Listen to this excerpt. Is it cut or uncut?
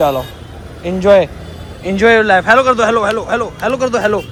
uncut